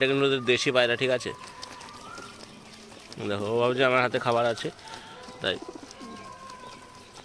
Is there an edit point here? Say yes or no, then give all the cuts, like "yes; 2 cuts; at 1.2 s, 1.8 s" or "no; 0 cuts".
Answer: no; 0 cuts